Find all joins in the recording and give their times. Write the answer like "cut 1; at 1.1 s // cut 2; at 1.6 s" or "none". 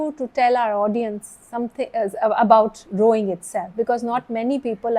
none